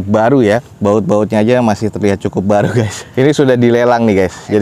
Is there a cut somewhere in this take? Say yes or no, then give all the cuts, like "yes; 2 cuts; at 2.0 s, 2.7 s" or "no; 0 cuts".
no; 0 cuts